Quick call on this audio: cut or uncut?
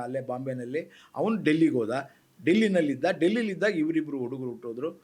uncut